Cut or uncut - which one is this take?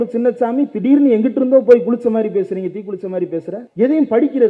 cut